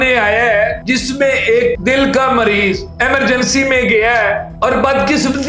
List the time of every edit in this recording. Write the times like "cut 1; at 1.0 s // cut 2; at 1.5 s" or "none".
cut 1; at 0.8 s // cut 2; at 1.8 s // cut 3; at 4.5 s